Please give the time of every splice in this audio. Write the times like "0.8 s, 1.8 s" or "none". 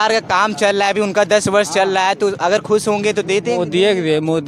none